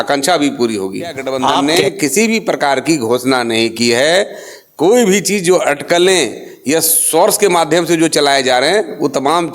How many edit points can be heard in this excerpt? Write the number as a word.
one